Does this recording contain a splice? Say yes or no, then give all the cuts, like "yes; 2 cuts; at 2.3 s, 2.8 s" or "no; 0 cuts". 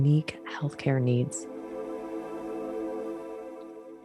yes; 1 cut; at 1.4 s